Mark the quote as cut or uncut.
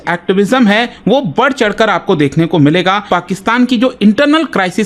cut